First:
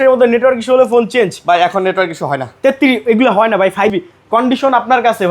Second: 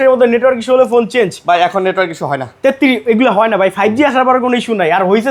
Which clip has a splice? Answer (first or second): first